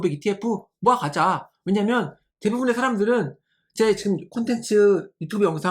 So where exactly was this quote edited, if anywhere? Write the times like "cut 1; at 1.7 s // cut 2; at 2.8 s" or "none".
none